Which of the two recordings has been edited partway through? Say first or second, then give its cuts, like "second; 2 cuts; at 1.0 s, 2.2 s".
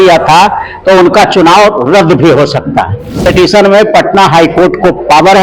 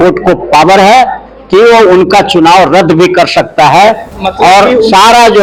first; 1 cut; at 3.2 s